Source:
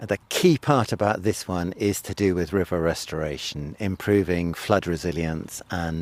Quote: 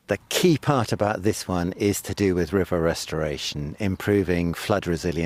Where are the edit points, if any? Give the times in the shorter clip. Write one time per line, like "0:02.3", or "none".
none